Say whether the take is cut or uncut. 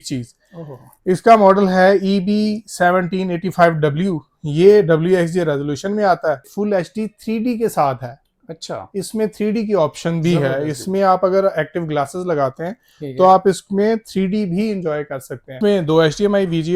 cut